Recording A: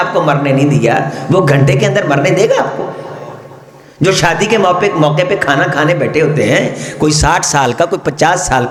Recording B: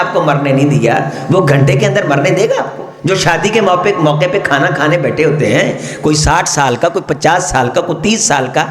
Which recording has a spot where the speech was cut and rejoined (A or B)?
B